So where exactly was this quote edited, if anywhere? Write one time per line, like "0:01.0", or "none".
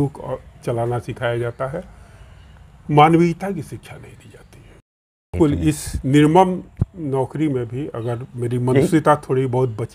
0:05.3